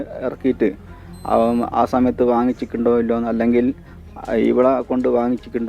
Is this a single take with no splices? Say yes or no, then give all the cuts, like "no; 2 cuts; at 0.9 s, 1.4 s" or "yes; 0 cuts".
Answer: yes; 0 cuts